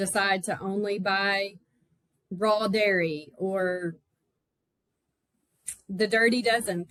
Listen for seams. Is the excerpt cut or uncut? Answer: uncut